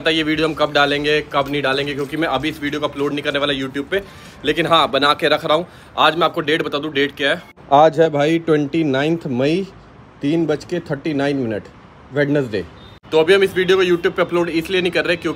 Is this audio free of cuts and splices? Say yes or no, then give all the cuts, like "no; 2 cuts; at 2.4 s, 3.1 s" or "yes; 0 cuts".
yes; 0 cuts